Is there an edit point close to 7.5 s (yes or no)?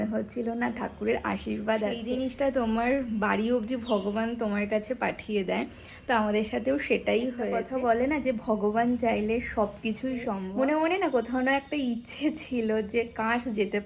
yes